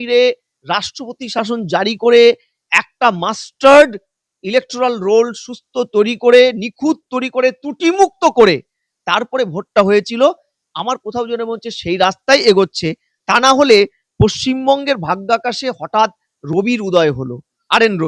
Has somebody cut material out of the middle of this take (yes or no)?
no